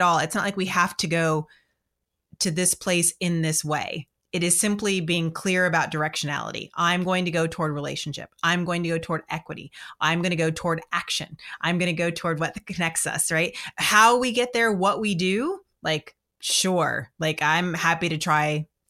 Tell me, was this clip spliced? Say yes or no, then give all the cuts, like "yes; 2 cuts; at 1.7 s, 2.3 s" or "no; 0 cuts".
no; 0 cuts